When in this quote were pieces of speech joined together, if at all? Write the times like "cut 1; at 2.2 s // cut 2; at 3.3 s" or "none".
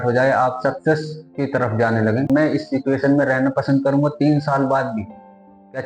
cut 1; at 2.3 s

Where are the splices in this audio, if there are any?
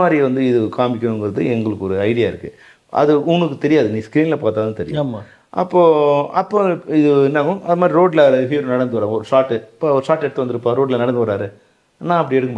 none

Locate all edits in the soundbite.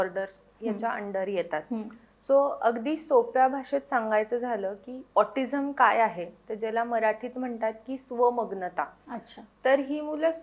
none

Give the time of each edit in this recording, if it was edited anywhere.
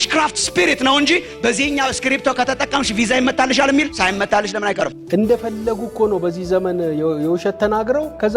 cut 1; at 4.9 s

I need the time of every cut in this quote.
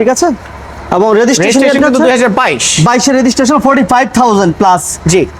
none

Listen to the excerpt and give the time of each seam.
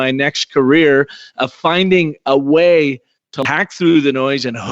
cut 1; at 3.5 s

